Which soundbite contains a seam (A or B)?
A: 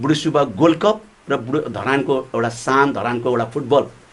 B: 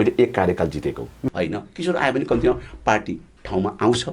B